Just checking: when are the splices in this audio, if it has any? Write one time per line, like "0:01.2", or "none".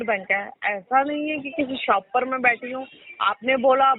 none